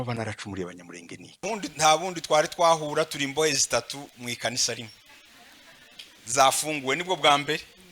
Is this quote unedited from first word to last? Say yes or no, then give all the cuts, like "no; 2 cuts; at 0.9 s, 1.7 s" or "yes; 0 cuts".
no; 1 cut; at 1.4 s